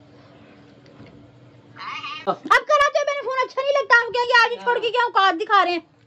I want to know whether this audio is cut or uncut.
cut